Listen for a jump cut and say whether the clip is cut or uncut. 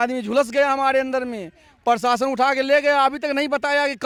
uncut